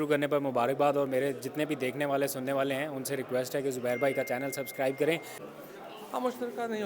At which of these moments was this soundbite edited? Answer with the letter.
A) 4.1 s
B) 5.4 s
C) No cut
B